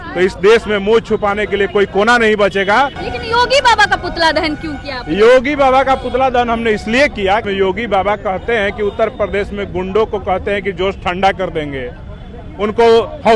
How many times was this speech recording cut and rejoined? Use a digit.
2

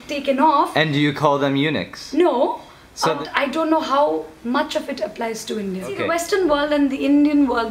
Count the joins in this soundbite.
2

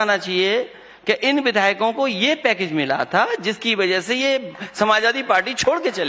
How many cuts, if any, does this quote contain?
0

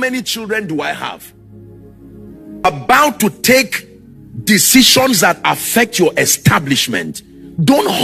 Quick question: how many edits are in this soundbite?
1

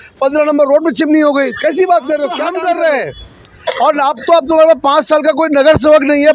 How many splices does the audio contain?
1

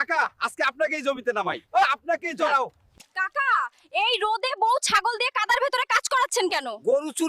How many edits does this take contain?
1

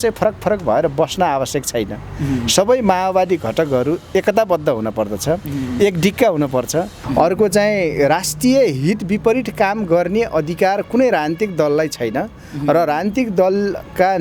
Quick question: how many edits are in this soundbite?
1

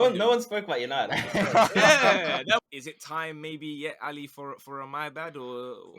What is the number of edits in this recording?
1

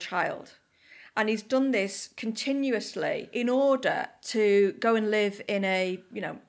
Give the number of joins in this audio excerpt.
1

